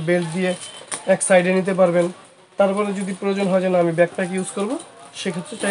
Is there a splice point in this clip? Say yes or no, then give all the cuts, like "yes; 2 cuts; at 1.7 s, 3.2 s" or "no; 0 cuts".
no; 0 cuts